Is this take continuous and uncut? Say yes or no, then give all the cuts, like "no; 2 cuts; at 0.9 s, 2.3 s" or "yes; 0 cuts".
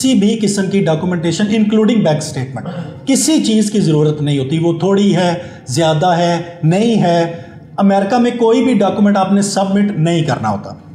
yes; 0 cuts